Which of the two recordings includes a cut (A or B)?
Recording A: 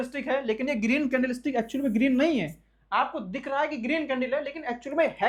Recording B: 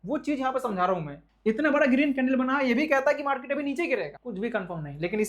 B